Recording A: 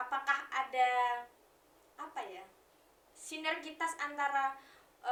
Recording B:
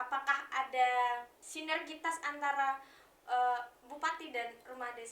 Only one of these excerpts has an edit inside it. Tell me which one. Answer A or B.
B